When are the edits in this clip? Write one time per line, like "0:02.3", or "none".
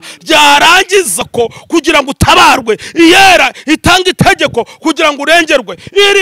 0:01.2